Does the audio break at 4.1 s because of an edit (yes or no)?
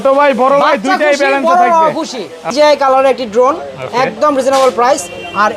no